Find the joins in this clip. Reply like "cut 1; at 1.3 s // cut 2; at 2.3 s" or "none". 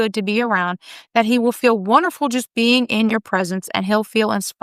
none